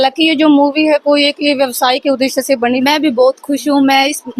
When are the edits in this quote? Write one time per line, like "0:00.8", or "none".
0:02.8